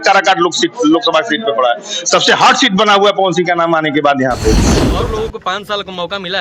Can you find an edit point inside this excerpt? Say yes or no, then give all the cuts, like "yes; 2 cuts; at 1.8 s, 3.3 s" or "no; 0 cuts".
yes; 1 cut; at 4.8 s